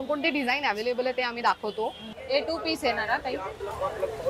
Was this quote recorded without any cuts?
no; 1 cut; at 2.1 s

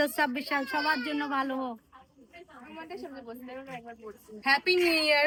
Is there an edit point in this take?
no; 0 cuts

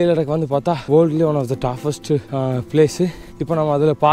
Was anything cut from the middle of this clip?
no; 0 cuts

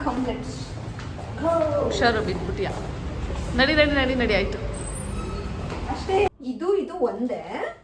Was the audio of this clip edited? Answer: yes; 1 cut; at 6.3 s

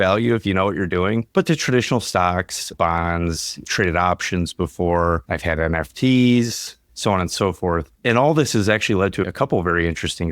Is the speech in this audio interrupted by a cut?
yes; 1 cut; at 9.3 s

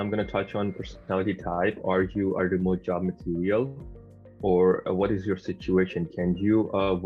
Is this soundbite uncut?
yes; 0 cuts

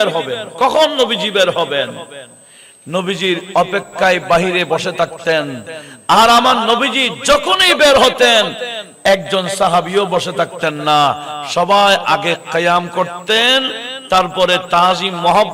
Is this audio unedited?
yes; 0 cuts

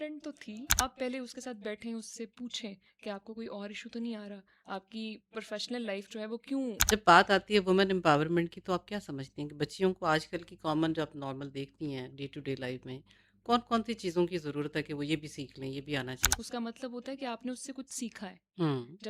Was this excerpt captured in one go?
no; 3 cuts; at 0.8 s, 6.8 s, 16.3 s

